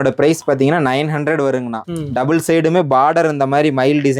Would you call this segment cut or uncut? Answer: cut